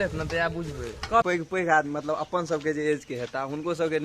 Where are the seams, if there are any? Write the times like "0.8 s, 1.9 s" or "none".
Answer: 1.2 s

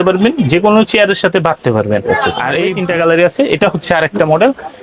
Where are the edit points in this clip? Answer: 2.7 s

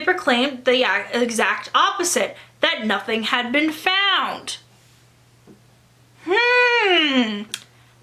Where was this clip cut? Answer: none

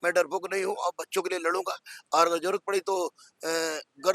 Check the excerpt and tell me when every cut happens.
none

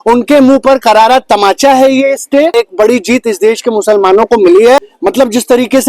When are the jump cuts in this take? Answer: 2.5 s, 4.8 s

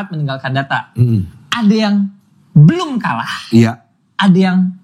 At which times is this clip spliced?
none

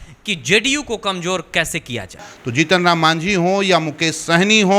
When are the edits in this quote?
2.3 s

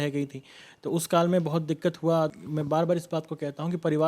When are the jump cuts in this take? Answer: 2.3 s

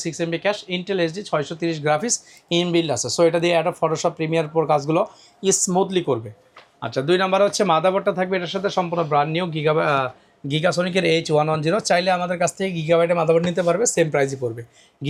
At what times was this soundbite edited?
none

